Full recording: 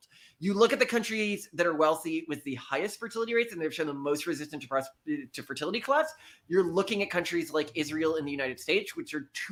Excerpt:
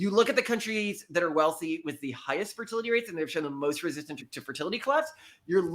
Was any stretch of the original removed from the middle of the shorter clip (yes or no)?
yes